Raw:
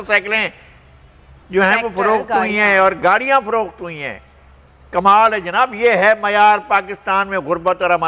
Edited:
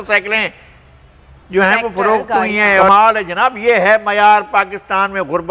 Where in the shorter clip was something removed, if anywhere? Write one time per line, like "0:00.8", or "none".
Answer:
0:02.9